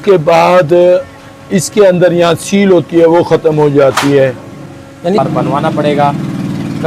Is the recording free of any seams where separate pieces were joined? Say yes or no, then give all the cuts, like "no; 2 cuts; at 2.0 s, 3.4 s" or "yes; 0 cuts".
yes; 0 cuts